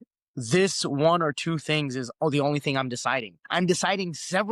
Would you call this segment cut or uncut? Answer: cut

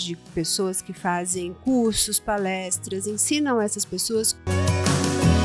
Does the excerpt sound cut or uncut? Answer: cut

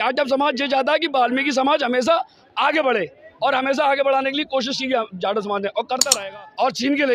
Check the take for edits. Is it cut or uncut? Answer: cut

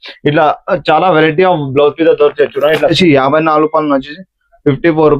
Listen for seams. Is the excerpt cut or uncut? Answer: cut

